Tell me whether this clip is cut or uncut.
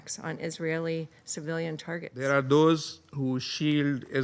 cut